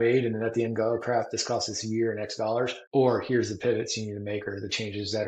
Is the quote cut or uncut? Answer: cut